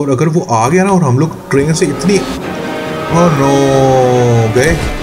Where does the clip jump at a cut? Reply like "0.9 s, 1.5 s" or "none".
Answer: none